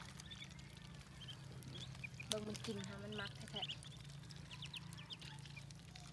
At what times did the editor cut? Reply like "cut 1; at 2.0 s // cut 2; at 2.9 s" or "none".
none